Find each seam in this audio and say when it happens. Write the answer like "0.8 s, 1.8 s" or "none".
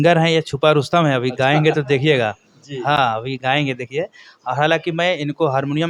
none